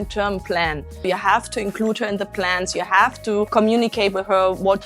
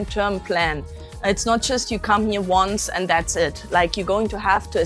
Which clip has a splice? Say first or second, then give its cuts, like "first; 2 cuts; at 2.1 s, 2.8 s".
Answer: first; 2 cuts; at 1.0 s, 3.5 s